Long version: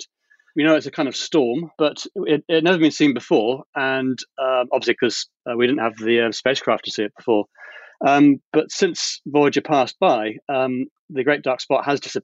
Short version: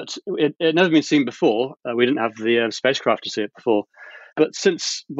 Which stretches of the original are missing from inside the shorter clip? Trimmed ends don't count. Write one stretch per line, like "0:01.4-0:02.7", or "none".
0:03.7-0:05.4
0:07.9-0:08.4